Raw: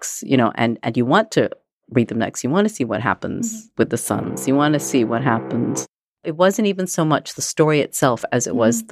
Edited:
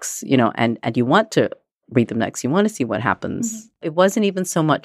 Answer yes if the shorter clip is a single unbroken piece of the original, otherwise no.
no